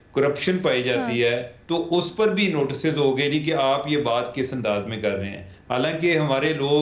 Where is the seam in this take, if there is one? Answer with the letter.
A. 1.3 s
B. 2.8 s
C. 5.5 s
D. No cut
D